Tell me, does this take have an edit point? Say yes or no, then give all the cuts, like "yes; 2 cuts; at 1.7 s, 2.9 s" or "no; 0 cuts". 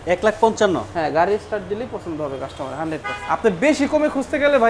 yes; 1 cut; at 3.1 s